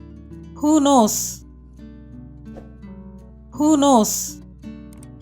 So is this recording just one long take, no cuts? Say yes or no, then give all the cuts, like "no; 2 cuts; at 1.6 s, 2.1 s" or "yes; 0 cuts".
no; 3 cuts; at 1.1 s, 3.1 s, 4.3 s